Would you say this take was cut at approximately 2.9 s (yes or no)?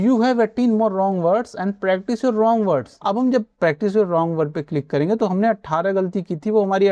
yes